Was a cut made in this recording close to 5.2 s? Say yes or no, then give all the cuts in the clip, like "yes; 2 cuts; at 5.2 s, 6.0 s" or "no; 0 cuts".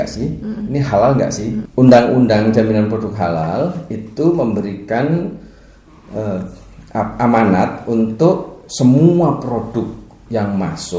no; 1 cut; at 1.6 s